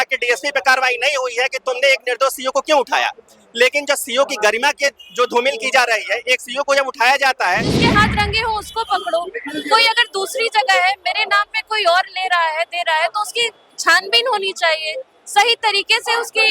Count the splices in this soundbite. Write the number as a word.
one